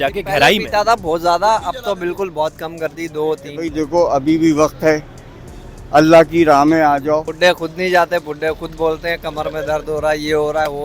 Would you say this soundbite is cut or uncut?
cut